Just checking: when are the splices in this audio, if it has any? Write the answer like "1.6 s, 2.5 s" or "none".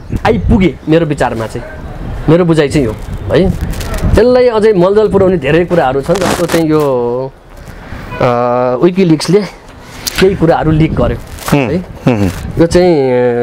none